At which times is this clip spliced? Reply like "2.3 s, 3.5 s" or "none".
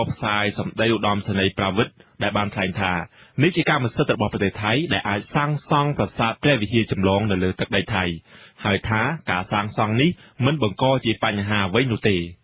1.0 s